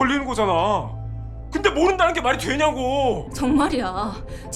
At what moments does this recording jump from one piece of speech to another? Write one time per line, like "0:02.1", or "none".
0:03.3